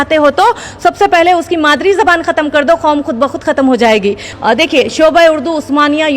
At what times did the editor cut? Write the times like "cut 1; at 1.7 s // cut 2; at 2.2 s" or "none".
cut 1; at 4.3 s

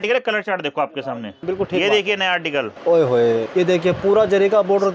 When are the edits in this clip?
cut 1; at 1.3 s // cut 2; at 2.7 s // cut 3; at 3.5 s

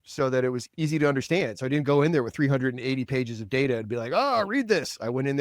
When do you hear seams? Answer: none

